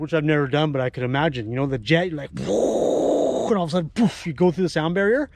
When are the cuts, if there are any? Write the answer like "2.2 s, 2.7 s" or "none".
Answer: none